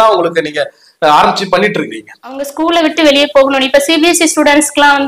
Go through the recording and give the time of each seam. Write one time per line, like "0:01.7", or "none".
0:02.5